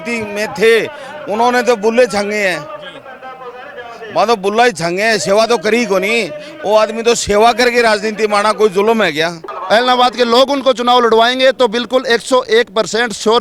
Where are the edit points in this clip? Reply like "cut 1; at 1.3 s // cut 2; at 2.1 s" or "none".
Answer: cut 1; at 9.5 s